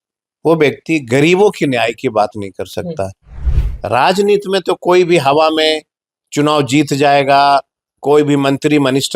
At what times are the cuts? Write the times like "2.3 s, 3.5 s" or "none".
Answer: 3.5 s

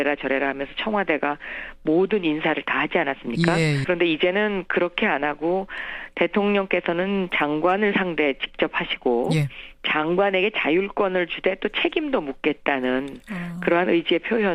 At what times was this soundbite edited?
none

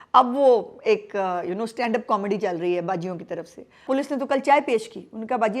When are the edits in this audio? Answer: 3.8 s

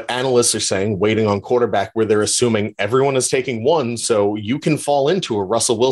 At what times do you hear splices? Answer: none

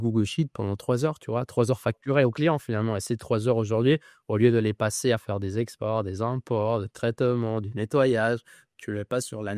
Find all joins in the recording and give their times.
none

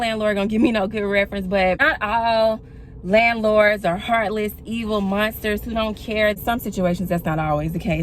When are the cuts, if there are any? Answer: 1.8 s, 6.4 s

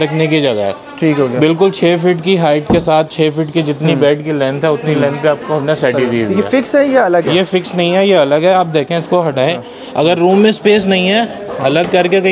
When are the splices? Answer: none

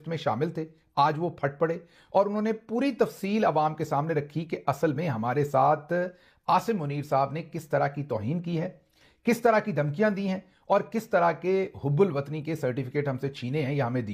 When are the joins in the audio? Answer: none

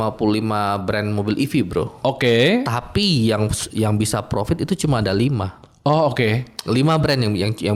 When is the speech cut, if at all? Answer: none

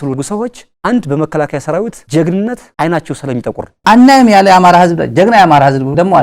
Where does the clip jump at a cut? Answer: 2.0 s, 3.7 s

